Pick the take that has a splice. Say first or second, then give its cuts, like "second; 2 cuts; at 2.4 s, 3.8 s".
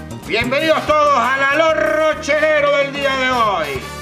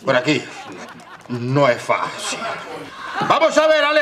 first; 1 cut; at 2.5 s